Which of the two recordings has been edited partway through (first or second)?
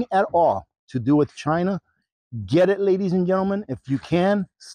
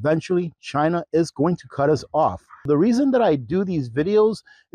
second